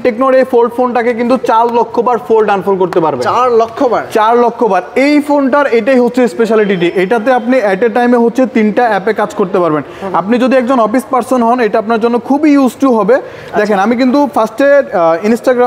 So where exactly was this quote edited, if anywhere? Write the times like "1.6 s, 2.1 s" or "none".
none